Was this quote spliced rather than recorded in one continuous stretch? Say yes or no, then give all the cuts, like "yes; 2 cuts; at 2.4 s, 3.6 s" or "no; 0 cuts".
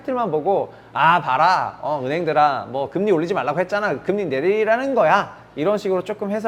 no; 0 cuts